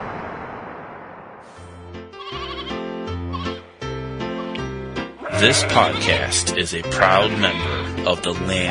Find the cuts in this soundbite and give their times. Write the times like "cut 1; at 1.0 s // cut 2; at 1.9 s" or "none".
cut 1; at 1.7 s